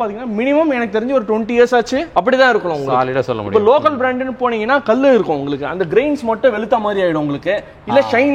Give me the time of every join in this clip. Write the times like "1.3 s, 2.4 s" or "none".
none